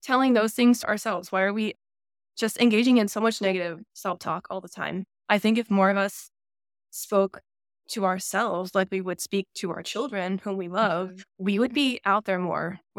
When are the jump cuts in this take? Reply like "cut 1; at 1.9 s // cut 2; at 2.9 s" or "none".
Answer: cut 1; at 0.8 s // cut 2; at 11.2 s